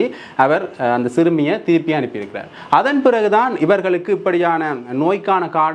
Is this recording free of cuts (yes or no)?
yes